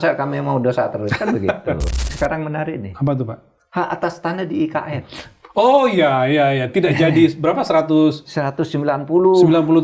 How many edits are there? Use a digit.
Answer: 1